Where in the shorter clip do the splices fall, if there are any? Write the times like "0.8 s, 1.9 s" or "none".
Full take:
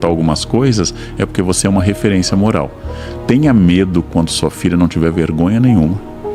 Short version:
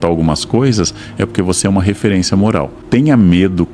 2.8 s